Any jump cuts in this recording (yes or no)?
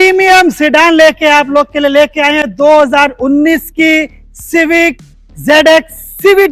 no